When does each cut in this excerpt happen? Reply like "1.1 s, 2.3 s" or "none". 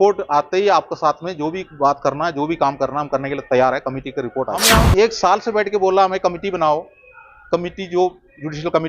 4.6 s